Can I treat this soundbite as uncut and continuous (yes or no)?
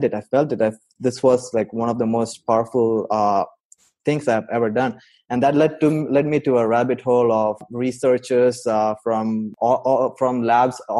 no